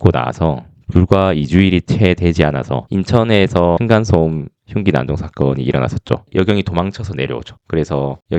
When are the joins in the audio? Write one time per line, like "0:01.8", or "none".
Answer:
0:02.8
0:03.8
0:06.3